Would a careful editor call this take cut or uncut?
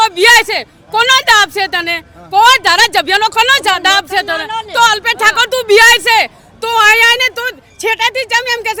uncut